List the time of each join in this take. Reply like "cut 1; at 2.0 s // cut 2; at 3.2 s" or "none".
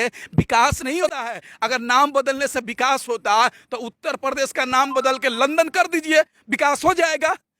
cut 1; at 1.0 s